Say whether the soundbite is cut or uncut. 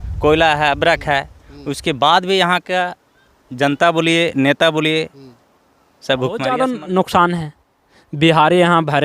cut